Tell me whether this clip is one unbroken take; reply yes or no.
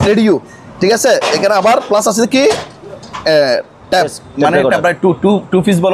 yes